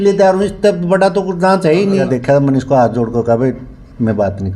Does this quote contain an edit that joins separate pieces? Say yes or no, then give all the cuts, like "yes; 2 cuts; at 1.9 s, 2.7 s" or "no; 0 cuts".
yes; 1 cut; at 2.0 s